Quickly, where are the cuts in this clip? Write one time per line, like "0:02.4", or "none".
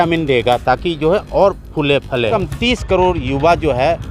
0:02.3